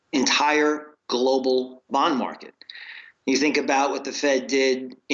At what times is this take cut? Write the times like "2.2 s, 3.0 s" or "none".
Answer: 3.9 s